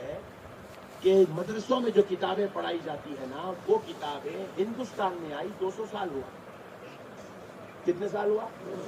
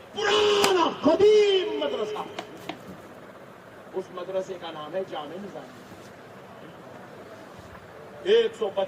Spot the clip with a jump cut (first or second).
second